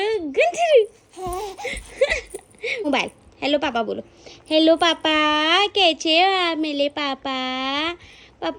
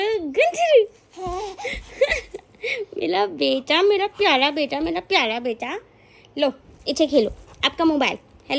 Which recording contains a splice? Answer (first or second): first